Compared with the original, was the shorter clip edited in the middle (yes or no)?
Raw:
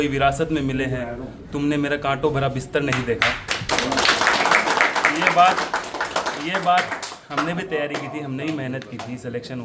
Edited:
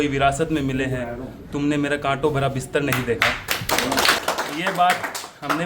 yes